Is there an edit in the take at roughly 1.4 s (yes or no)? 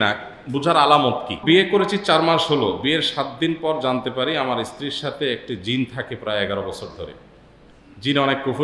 yes